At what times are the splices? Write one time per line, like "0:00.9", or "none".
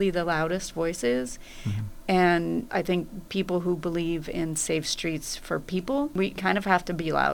0:06.2